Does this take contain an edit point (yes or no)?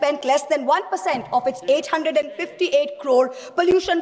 no